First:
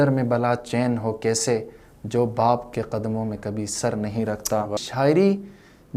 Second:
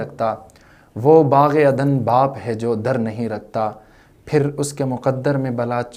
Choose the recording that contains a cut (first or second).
first